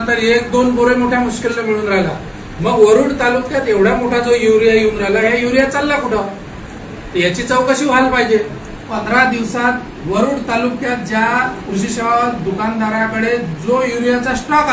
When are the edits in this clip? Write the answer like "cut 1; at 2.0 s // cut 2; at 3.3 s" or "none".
cut 1; at 8.9 s